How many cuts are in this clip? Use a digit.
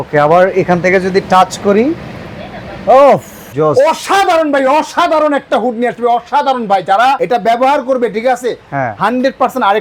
2